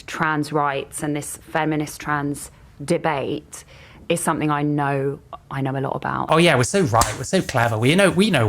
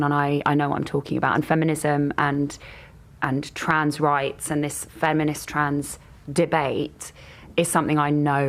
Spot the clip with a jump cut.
first; 1 cut; at 6.3 s

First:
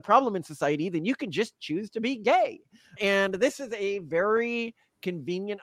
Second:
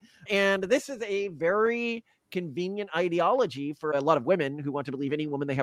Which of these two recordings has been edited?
second; 1 cut; at 3.9 s

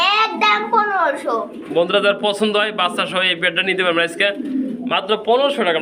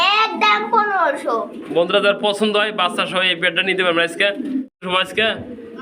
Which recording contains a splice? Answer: second; 1 cut; at 4.7 s

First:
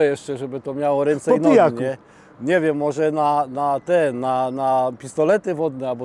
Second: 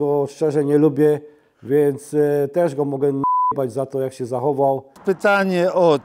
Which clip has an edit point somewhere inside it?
second; 1 cut; at 4.9 s

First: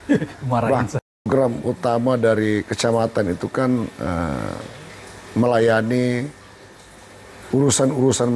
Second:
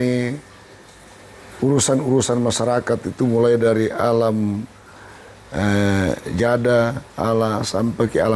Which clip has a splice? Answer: first; 1 cut; at 1.0 s

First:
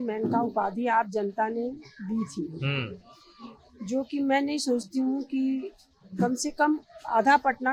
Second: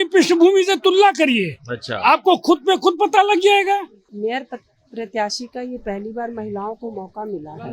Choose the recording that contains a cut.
second; 1 cut; at 4.0 s

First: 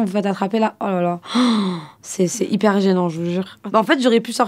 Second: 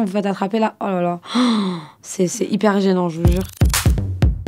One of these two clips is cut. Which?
second; 1 cut; at 3.5 s

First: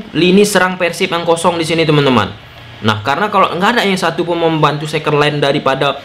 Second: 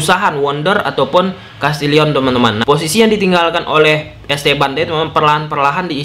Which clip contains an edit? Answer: second; 1 cut; at 2.6 s

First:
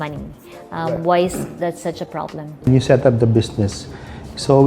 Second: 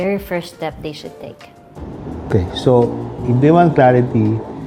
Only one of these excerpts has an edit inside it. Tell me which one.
first; 1 cut; at 2.7 s

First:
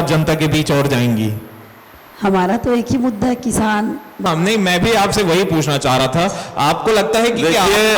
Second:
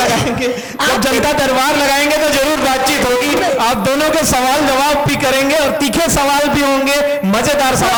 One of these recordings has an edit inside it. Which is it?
first; 1 cut; at 4.2 s

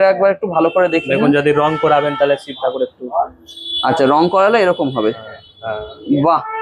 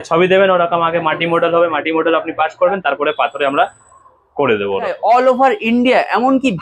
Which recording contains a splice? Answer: second; 1 cut; at 5.0 s

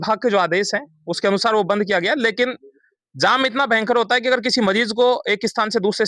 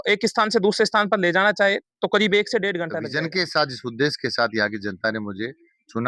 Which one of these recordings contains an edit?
second; 1 cut; at 3.0 s

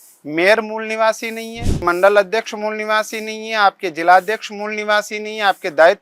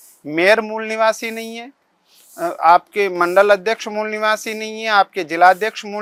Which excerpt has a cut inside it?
first; 1 cut; at 1.8 s

